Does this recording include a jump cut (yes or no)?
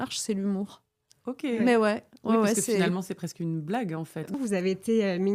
yes